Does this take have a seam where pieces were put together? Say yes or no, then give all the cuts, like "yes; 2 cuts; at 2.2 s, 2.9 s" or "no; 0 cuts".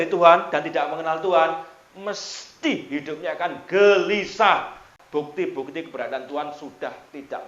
yes; 1 cut; at 5.0 s